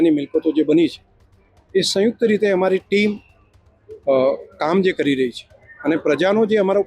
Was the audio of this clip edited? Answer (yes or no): no